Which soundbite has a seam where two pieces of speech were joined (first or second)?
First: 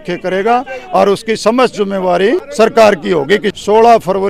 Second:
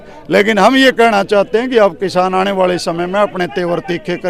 first